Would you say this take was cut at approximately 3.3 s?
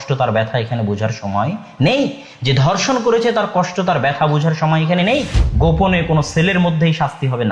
no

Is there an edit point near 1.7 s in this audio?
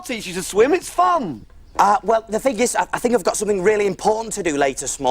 no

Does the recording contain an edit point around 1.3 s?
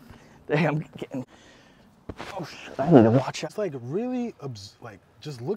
yes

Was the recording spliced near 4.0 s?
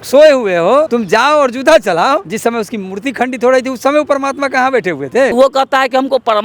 no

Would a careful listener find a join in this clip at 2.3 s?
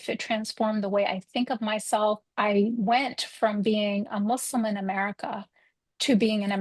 yes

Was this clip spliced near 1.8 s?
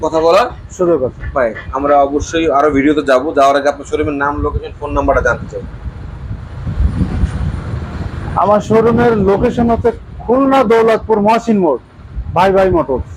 no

